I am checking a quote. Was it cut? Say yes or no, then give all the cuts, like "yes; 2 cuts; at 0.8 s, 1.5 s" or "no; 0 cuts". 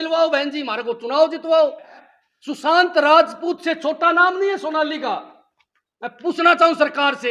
yes; 1 cut; at 1.9 s